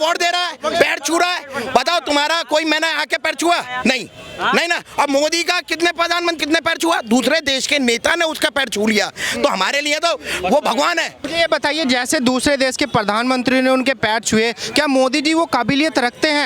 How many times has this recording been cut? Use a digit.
2